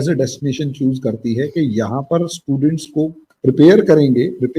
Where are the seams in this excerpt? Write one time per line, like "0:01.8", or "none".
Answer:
0:03.3